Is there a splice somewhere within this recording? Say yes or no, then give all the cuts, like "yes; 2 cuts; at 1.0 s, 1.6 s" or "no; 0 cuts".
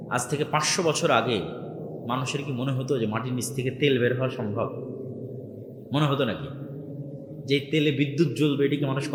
no; 0 cuts